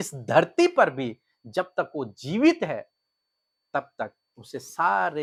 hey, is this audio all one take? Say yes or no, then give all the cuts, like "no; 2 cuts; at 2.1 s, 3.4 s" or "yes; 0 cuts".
yes; 0 cuts